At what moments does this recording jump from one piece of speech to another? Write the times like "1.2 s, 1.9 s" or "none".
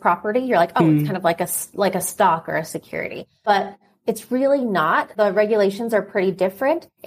3.4 s, 5.1 s